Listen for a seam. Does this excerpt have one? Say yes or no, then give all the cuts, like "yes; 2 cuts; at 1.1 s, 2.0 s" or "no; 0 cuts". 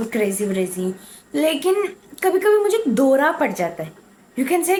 no; 0 cuts